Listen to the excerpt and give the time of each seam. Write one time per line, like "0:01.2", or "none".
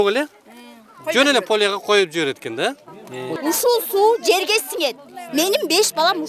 0:03.4